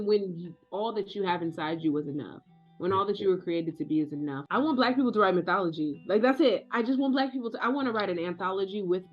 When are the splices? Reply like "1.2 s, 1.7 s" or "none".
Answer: 4.4 s